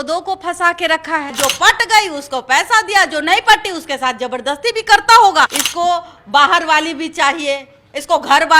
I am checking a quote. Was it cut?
yes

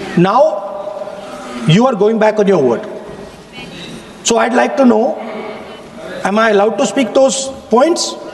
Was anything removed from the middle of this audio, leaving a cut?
no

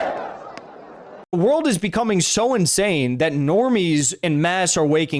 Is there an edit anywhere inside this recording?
yes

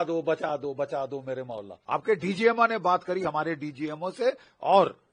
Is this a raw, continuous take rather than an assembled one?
no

